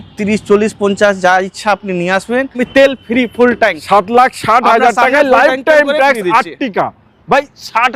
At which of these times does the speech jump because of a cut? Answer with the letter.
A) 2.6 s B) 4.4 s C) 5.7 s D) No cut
A